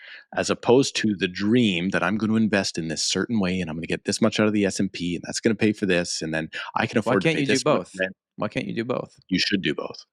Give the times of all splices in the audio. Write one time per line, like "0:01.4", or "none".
none